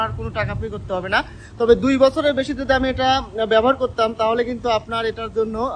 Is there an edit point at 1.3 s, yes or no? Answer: no